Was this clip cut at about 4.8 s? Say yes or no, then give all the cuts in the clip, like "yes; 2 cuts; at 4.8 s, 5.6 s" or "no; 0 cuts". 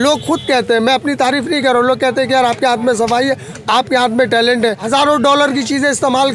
yes; 1 cut; at 4.8 s